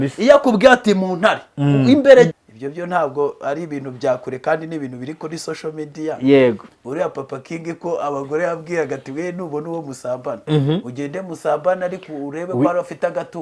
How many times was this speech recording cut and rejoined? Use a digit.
1